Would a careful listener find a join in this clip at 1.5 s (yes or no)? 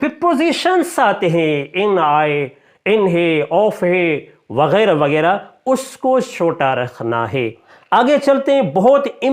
no